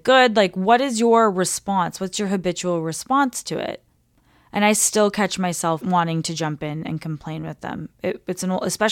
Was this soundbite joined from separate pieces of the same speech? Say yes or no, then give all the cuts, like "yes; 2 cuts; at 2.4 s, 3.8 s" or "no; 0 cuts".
yes; 1 cut; at 5.8 s